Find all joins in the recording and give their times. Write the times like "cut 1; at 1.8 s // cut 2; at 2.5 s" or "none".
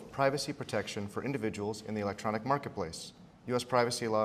cut 1; at 1.4 s